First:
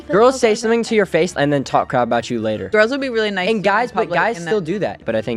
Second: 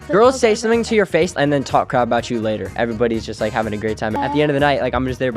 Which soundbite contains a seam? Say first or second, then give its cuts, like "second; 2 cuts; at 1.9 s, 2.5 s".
second; 2 cuts; at 2.7 s, 4.2 s